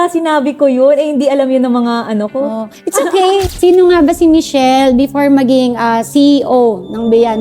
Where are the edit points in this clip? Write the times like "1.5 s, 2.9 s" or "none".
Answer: 3.5 s